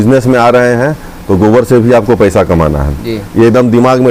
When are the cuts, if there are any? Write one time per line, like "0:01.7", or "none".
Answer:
none